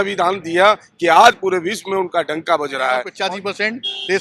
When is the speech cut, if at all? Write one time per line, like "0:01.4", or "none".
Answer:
0:03.1

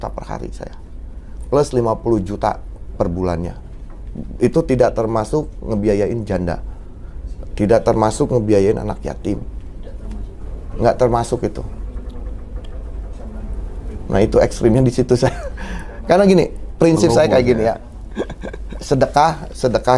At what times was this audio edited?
none

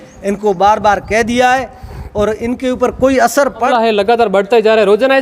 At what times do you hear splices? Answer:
0:03.6

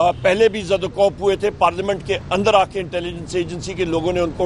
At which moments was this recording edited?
none

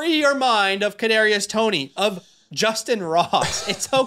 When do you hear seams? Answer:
none

